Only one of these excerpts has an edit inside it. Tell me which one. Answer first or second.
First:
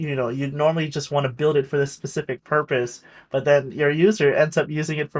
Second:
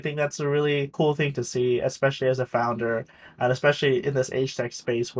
second